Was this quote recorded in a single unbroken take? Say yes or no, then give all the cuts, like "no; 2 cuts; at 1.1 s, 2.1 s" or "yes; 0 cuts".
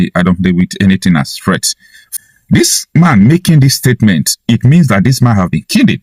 no; 1 cut; at 2.1 s